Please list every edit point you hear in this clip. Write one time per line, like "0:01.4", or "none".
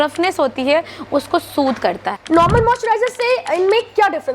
0:02.1

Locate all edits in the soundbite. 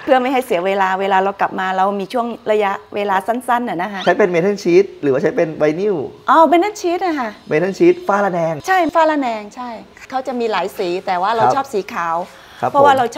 0:03.9
0:10.0

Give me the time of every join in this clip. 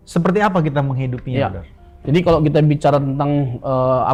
none

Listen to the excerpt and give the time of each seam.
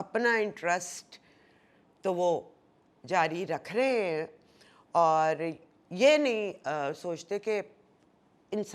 none

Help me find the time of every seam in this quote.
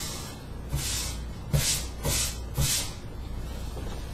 0:01.4

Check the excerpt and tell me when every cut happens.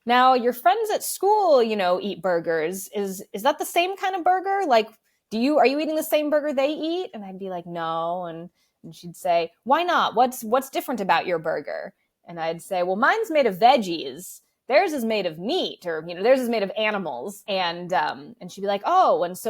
0:17.3

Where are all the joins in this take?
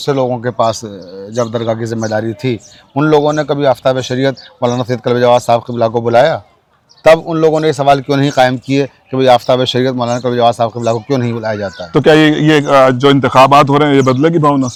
none

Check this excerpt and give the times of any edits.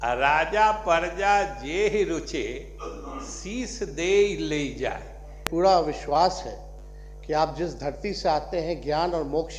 0:05.5

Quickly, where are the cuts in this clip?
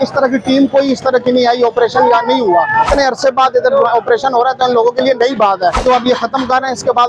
0:02.9
0:05.8

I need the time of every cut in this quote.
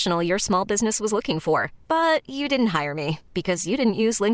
none

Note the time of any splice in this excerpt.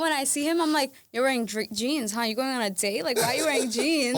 none

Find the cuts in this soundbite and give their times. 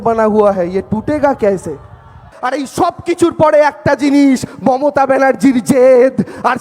0:02.3

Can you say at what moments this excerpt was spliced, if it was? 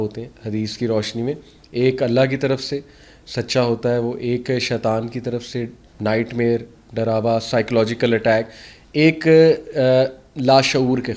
none

